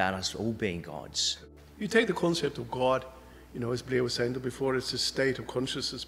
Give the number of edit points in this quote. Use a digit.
1